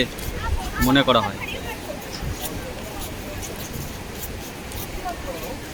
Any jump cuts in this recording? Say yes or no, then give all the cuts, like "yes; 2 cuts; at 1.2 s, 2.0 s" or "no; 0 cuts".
no; 0 cuts